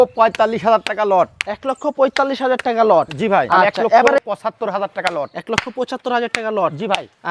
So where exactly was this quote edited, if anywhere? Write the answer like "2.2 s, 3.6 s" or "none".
4.1 s